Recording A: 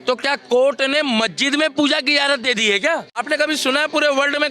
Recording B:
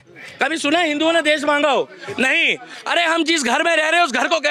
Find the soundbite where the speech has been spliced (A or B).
A